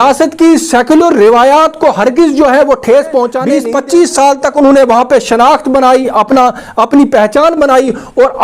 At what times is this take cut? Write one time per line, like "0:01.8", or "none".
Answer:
0:03.4